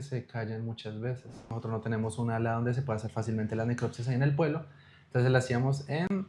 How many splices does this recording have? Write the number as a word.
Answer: one